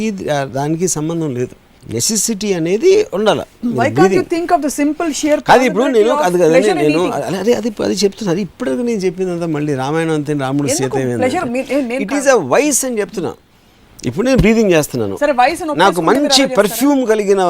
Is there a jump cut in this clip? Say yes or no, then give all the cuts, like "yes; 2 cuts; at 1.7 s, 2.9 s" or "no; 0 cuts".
no; 0 cuts